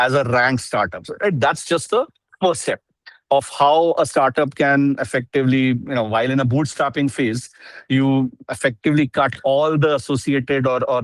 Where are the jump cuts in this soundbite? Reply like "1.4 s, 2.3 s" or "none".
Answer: none